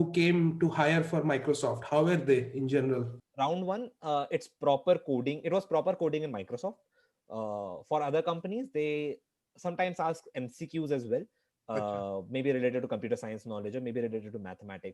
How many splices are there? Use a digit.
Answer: 1